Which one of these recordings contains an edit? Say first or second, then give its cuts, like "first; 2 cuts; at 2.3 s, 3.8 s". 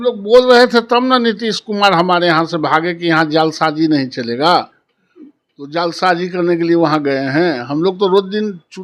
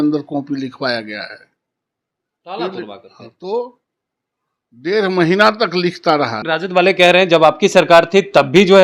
second; 1 cut; at 6.4 s